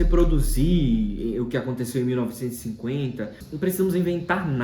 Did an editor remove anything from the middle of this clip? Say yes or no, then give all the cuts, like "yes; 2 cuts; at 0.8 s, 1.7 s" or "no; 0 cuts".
yes; 1 cut; at 3.4 s